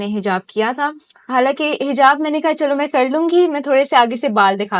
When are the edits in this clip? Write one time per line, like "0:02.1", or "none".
none